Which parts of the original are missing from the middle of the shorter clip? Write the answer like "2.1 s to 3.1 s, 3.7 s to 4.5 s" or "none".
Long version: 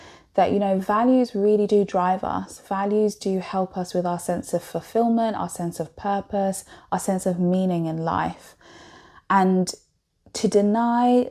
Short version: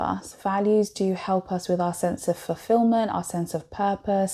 none